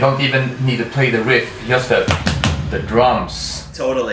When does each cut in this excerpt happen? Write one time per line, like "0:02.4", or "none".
none